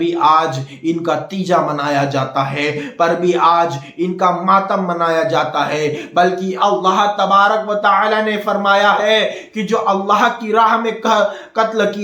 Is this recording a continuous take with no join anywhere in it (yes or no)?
yes